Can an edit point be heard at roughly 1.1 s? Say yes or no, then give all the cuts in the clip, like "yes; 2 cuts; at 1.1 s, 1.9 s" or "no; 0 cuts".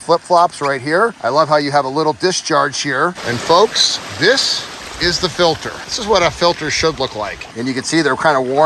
no; 2 cuts; at 3.2 s, 7.5 s